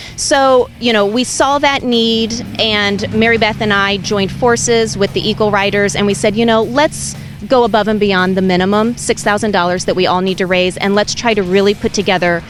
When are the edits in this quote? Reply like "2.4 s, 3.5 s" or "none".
none

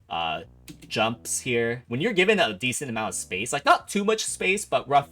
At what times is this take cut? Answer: 1.8 s

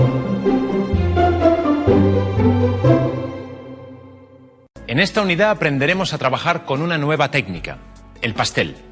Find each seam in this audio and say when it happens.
none

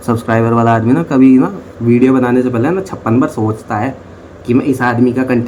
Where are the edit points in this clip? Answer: none

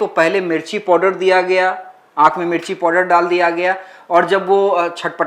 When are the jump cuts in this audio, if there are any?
none

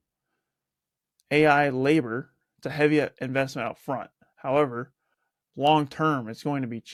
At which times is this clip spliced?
none

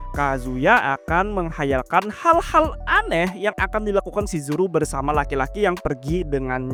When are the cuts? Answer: none

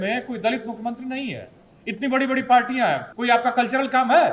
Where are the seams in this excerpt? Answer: 3.1 s

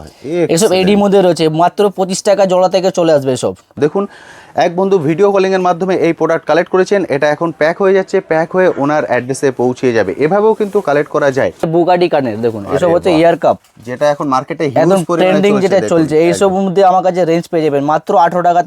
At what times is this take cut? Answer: 3.7 s, 11.7 s

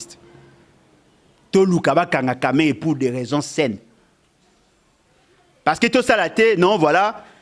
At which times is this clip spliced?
none

